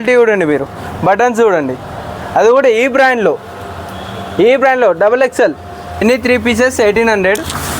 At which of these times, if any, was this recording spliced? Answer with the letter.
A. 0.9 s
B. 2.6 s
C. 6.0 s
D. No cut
C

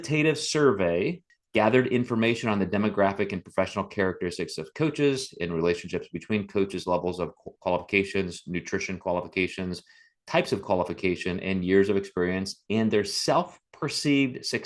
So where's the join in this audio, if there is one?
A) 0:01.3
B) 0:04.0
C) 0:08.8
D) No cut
A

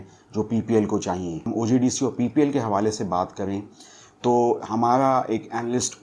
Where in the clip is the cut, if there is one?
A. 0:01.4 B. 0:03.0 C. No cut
A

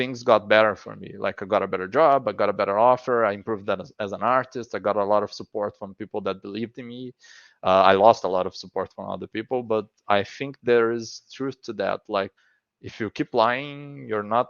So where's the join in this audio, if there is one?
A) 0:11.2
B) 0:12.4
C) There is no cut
B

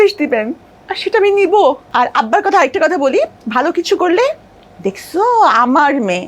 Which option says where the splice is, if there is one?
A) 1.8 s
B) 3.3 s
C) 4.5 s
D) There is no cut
A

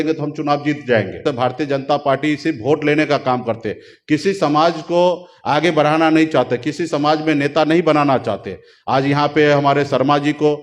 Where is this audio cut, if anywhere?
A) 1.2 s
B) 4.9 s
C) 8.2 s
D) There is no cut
A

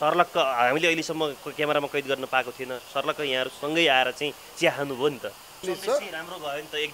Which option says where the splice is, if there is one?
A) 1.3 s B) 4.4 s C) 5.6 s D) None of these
C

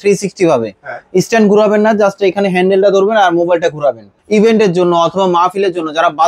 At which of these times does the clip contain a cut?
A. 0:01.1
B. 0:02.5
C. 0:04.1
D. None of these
C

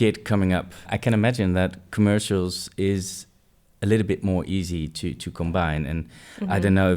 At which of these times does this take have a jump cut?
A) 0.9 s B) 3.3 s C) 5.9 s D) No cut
A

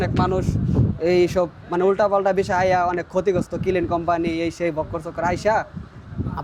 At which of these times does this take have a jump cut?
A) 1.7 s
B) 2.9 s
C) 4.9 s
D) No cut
D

